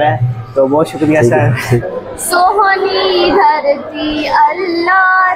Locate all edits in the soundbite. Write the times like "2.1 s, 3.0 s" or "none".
1.7 s